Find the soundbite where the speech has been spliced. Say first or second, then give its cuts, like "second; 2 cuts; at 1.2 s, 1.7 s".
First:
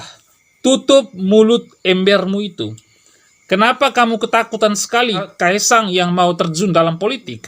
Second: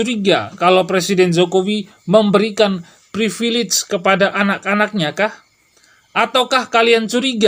first; 1 cut; at 5.3 s